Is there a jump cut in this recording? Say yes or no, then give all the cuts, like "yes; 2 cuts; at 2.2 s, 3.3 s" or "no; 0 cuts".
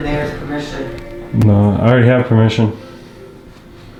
no; 0 cuts